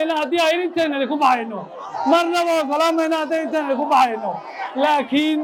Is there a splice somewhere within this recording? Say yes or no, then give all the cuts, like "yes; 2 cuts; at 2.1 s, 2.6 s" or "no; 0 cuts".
no; 0 cuts